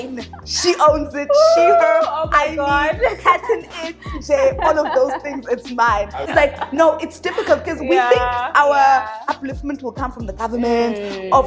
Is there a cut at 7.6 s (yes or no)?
no